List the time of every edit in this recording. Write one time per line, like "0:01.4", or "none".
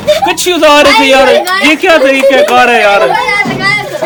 none